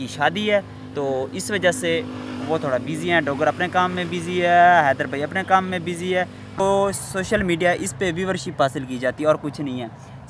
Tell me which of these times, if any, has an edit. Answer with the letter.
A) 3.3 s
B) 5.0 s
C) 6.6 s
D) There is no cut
C